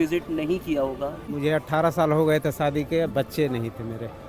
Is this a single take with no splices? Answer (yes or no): no